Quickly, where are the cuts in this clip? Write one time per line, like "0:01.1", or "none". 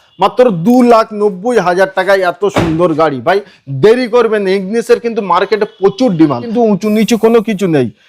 0:06.4